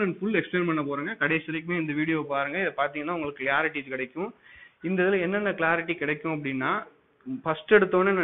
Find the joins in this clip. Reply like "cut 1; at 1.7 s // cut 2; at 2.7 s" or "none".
none